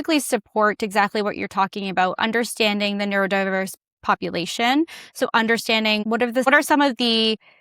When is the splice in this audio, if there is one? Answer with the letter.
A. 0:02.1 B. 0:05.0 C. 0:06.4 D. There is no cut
C